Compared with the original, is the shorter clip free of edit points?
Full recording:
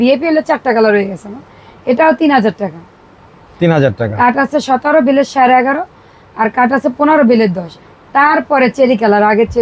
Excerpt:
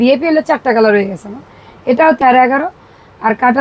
no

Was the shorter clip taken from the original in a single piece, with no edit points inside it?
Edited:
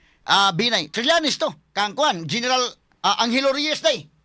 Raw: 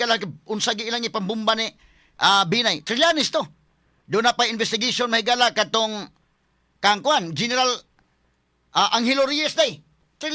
no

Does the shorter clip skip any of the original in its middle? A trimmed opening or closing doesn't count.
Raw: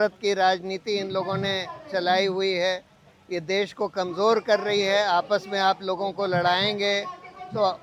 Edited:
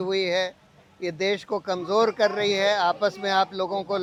no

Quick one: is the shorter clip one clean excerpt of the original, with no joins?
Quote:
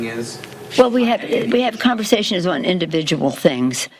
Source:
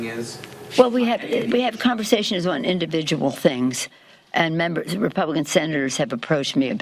yes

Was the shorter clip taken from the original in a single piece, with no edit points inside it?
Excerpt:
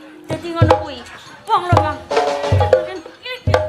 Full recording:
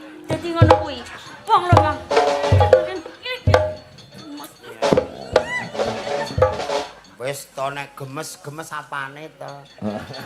yes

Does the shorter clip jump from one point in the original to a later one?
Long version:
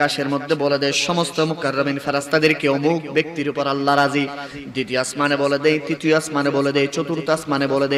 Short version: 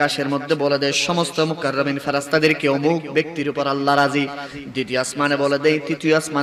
no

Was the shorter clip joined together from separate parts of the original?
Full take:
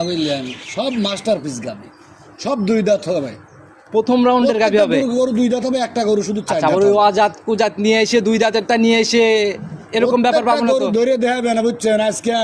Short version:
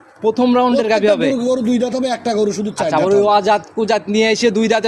no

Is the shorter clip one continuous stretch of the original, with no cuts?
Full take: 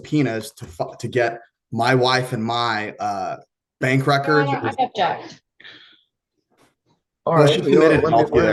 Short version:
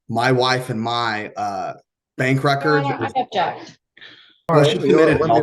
no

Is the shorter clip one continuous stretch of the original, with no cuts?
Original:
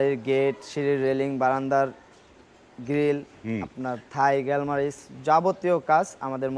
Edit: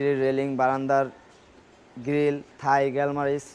no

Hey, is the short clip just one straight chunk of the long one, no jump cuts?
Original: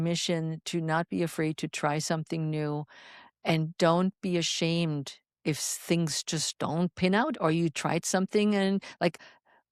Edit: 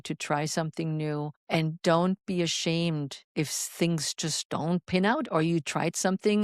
no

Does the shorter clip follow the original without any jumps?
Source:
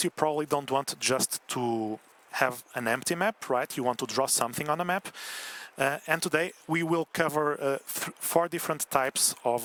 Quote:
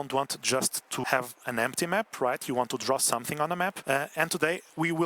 no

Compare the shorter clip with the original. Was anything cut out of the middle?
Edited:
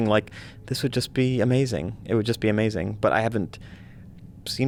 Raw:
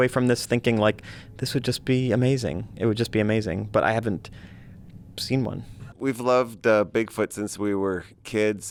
no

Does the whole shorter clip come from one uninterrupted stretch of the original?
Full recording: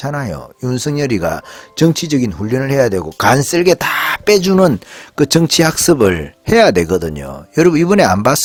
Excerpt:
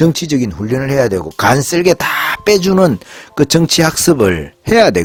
yes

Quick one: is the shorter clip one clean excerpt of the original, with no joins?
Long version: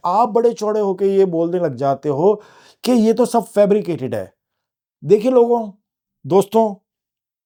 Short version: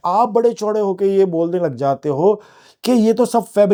yes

